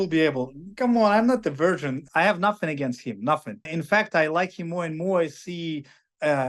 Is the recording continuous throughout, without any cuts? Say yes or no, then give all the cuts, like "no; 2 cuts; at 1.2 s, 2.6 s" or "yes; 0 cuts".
no; 2 cuts; at 2.0 s, 3.7 s